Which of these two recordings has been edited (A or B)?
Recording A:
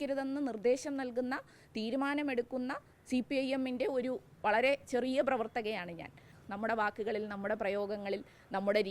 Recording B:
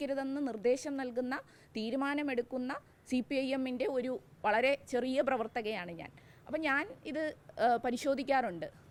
A